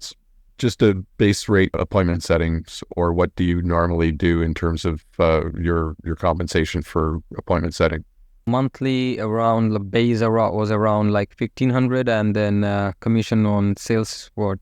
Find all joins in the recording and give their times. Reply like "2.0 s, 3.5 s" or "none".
1.8 s, 8.5 s

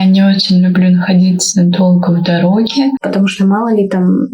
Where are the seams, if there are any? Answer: 3.0 s

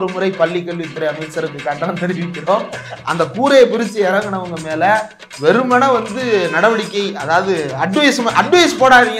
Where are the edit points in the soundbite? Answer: none

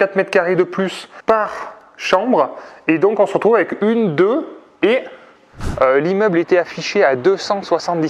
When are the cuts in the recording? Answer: 1.1 s, 5.6 s

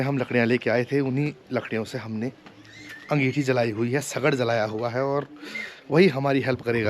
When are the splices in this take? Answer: none

